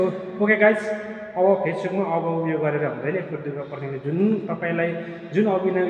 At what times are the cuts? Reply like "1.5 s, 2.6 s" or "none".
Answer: none